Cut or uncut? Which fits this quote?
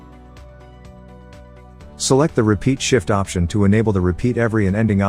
cut